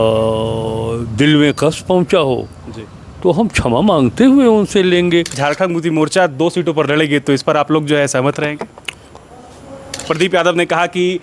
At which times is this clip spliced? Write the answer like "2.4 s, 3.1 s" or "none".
5.3 s, 10.1 s